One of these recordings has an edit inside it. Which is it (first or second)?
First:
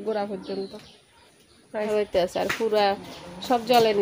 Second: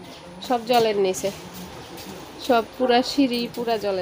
first